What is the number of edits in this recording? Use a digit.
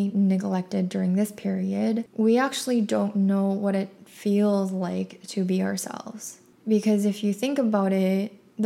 0